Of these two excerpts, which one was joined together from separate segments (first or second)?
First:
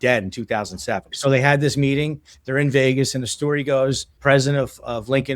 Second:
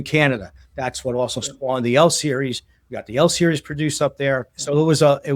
first